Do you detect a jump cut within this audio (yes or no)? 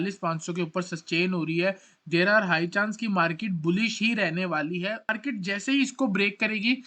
yes